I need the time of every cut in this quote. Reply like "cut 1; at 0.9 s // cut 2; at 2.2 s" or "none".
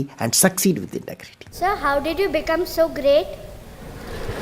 cut 1; at 1.5 s